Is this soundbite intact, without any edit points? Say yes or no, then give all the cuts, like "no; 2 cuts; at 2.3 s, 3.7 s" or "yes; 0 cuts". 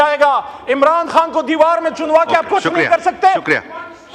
yes; 0 cuts